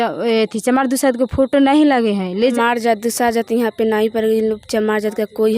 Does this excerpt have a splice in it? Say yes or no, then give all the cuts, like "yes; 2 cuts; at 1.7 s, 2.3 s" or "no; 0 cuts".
yes; 1 cut; at 2.3 s